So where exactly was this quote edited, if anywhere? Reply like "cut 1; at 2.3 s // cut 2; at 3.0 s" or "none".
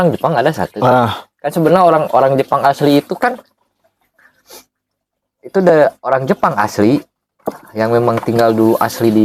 none

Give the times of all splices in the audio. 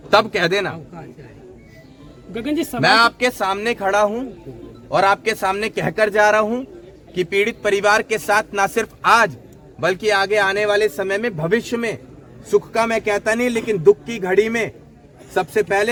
none

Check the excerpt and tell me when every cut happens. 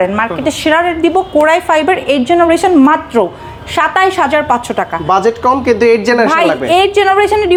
none

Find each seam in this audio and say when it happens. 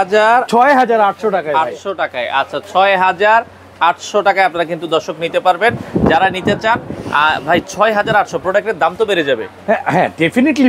none

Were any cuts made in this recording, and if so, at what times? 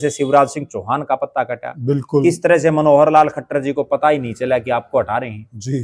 none

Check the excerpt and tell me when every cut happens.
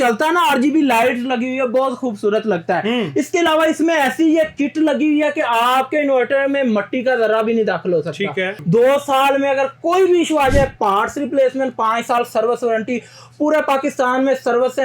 cut 1; at 8.6 s

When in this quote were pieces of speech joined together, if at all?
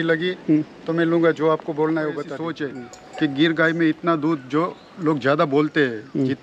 cut 1; at 2.6 s

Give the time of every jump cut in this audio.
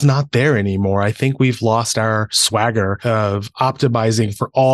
cut 1; at 2.6 s

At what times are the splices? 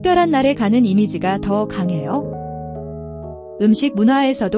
cut 1; at 2.2 s // cut 2; at 3.5 s

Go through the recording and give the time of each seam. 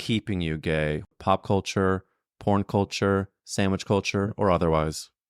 cut 1; at 1.1 s

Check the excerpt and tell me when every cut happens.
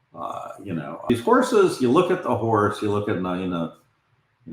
cut 1; at 1.0 s

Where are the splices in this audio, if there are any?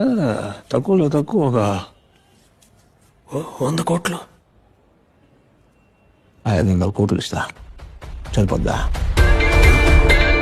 none

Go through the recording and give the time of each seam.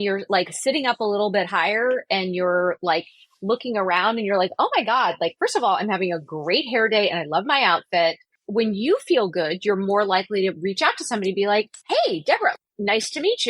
cut 1; at 8.3 s // cut 2; at 11.8 s // cut 3; at 12.5 s

